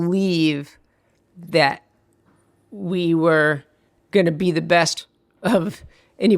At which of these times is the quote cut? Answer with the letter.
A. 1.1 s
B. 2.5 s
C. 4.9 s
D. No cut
C